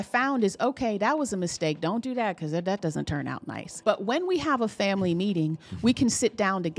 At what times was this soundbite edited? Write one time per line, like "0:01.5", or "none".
0:03.7

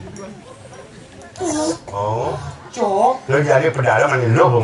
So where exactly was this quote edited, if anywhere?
0:01.9

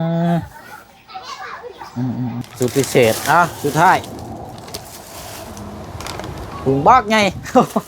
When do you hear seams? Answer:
0:02.4

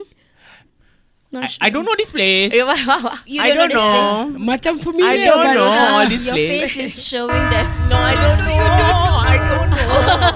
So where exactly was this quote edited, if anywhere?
none

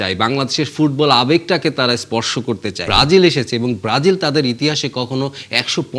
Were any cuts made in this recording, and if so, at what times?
0:02.8

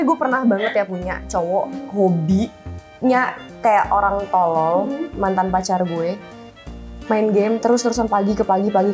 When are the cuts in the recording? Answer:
none

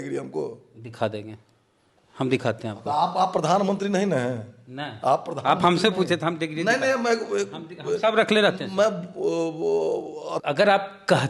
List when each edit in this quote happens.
0:10.4

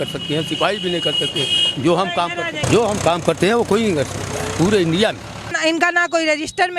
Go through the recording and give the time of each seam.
0:02.6
0:05.6

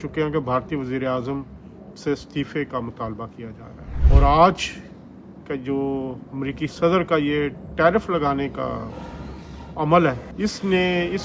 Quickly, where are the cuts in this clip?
none

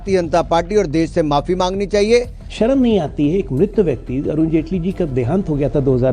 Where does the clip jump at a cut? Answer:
0:02.4

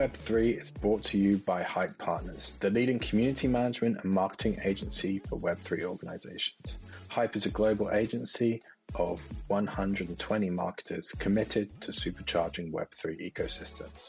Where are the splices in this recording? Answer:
none

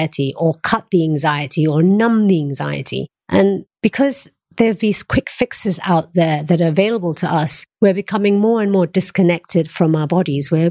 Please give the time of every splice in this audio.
0:03.7
0:07.6

